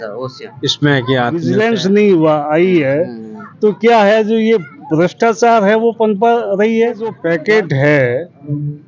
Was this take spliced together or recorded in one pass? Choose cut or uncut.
cut